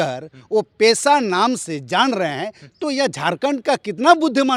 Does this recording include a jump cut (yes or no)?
no